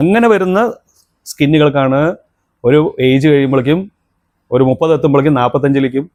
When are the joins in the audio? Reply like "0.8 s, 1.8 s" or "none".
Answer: none

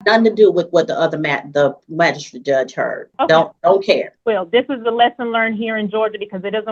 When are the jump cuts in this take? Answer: 3.0 s, 4.1 s

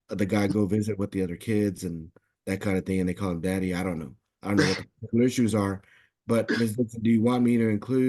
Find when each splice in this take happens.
none

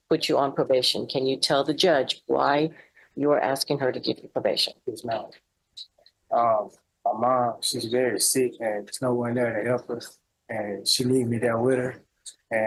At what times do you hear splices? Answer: none

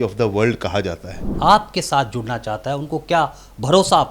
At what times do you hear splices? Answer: 1.3 s

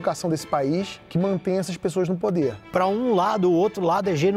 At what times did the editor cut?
1.0 s, 2.6 s

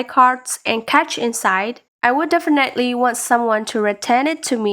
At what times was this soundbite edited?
1.8 s

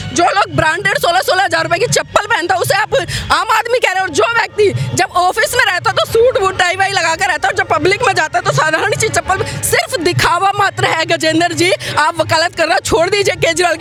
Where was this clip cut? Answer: none

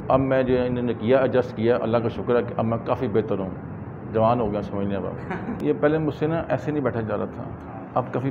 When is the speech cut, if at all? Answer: 5.6 s

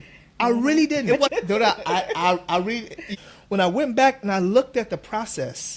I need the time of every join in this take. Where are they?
1.0 s, 3.1 s

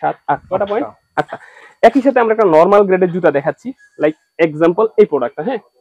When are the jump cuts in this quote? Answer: none

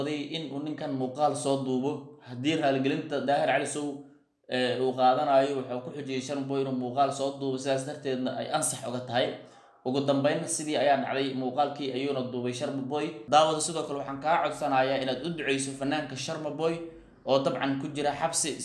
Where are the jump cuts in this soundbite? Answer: 13.2 s

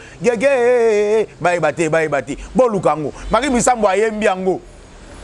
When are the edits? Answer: none

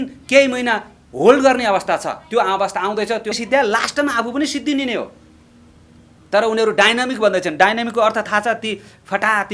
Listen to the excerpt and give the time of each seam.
3.3 s

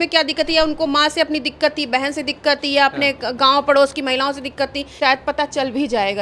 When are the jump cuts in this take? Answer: 4.8 s

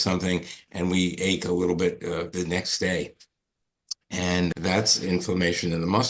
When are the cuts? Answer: 2.3 s, 4.5 s

